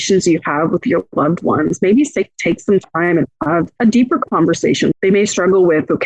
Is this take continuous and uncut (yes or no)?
no